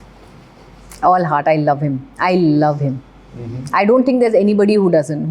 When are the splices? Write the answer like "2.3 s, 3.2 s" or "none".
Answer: none